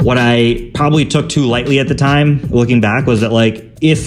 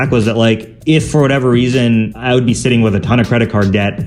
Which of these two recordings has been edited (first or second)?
second